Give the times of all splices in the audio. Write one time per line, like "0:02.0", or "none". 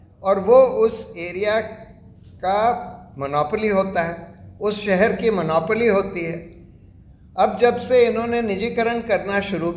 none